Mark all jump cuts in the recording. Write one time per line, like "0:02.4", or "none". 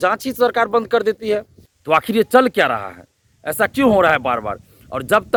none